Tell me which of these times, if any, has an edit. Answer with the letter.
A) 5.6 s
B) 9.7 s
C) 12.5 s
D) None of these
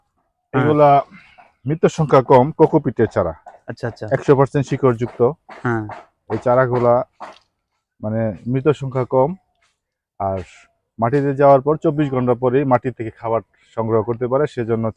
D